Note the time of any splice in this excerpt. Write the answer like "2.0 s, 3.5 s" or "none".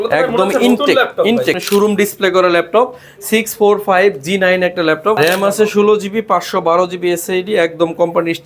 1.6 s, 5.2 s